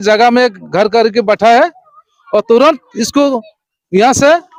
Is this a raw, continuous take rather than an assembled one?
yes; 0 cuts

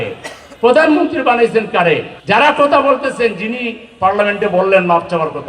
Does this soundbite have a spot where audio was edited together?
yes; 1 cut; at 2.1 s

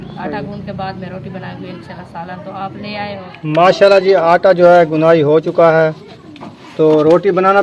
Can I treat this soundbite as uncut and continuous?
no; 1 cut; at 3.3 s

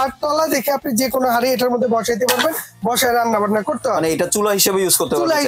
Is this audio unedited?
yes; 0 cuts

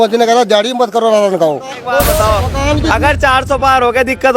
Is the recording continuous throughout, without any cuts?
no; 1 cut; at 1.9 s

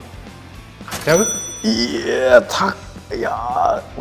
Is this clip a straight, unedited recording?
yes; 0 cuts

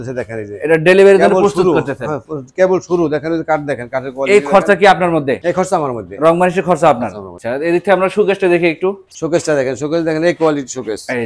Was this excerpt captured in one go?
yes; 0 cuts

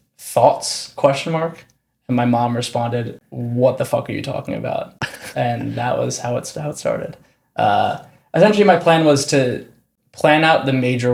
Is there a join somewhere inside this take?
no; 0 cuts

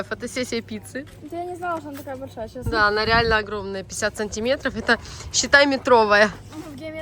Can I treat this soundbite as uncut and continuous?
yes; 0 cuts

